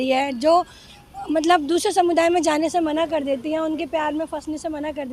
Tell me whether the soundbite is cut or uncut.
uncut